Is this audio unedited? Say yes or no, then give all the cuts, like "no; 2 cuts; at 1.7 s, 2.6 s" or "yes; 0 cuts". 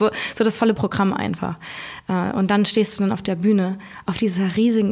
yes; 0 cuts